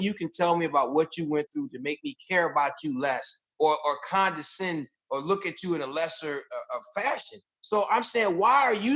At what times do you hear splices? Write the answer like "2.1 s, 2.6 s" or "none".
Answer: none